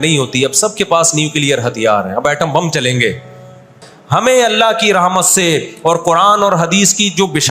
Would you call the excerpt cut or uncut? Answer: cut